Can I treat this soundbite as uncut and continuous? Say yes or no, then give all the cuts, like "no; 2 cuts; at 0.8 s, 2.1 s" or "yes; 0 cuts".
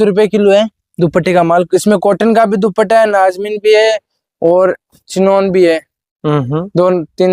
yes; 0 cuts